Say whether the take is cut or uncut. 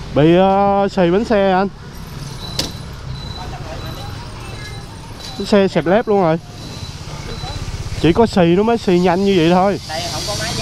uncut